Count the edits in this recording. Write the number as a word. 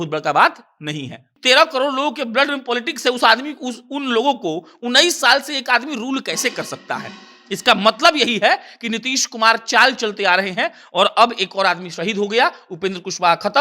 one